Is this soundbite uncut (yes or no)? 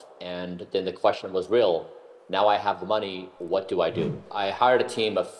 no